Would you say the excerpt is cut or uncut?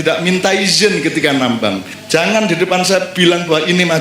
cut